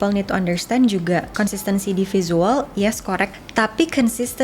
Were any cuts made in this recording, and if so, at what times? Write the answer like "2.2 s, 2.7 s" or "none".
3.3 s